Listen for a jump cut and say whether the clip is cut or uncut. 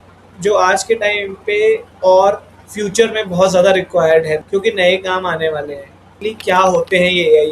cut